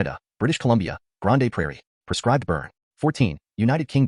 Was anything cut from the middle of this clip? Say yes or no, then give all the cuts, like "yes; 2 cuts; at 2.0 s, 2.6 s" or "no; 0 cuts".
yes; 1 cut; at 2.8 s